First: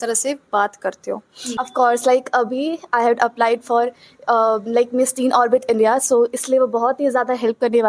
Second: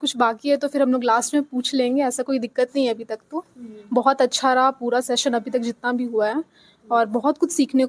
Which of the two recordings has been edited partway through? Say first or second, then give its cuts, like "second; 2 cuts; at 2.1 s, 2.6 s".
first; 1 cut; at 1.4 s